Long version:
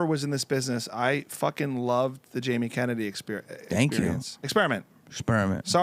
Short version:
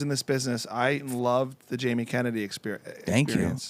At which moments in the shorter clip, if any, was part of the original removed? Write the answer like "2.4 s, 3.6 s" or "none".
1.1 s